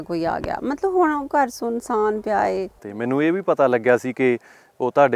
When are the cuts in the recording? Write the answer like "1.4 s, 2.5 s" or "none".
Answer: 2.8 s